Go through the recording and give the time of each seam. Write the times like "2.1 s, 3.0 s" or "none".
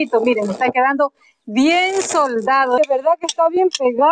2.8 s